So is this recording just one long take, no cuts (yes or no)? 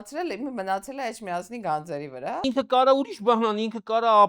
no